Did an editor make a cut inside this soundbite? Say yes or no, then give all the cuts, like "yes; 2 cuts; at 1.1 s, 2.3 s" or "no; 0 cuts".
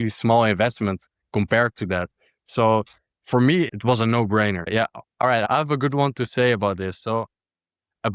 yes; 2 cuts; at 3.7 s, 4.6 s